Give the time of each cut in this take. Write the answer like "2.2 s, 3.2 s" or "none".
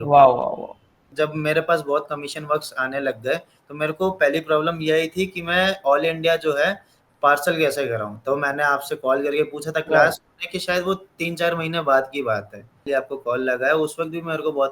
1.1 s, 12.8 s